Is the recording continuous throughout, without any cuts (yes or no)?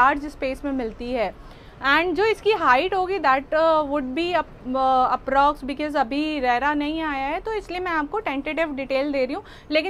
yes